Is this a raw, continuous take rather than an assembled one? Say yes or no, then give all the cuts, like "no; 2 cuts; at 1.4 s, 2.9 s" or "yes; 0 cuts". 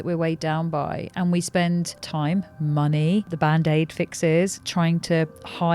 no; 2 cuts; at 2.0 s, 3.3 s